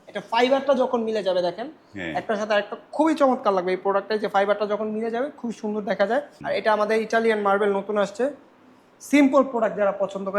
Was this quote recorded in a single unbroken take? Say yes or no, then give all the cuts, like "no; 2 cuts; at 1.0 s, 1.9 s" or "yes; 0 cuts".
no; 1 cut; at 6.4 s